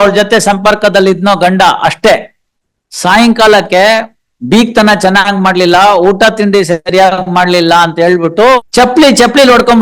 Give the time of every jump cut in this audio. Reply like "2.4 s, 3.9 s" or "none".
8.7 s